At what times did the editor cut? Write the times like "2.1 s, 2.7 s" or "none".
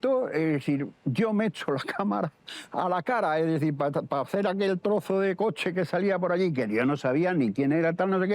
none